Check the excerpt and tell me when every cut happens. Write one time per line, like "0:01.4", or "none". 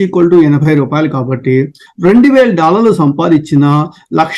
none

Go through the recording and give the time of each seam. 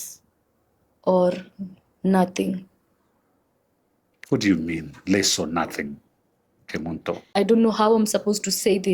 0:07.3

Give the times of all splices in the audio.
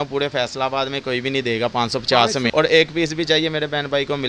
0:02.5

